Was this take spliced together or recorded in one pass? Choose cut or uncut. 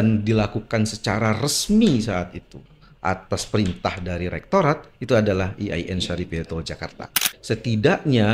cut